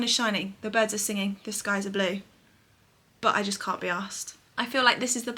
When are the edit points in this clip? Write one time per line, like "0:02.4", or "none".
none